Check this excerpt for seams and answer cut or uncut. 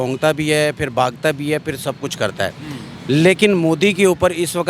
uncut